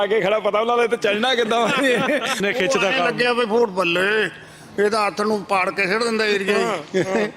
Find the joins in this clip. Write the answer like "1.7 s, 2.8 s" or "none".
2.4 s